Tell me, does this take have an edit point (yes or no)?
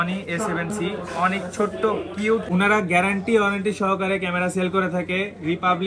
yes